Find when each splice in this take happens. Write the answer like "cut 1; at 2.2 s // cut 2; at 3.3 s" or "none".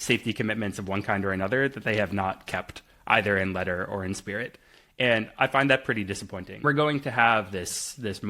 cut 1; at 6.6 s